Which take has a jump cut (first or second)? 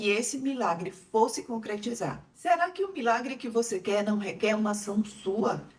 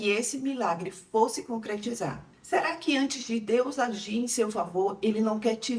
second